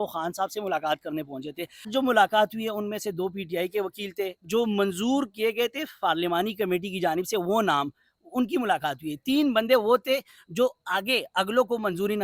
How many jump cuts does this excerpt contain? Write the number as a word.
one